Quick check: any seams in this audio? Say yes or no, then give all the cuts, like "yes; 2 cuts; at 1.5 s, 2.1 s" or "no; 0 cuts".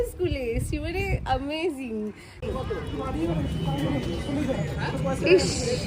yes; 1 cut; at 2.4 s